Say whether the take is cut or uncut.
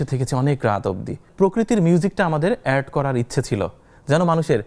cut